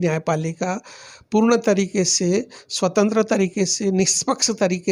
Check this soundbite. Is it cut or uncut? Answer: uncut